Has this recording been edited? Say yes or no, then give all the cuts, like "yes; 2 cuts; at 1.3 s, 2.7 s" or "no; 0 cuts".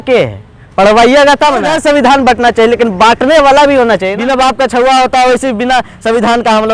yes; 2 cuts; at 1.7 s, 4.1 s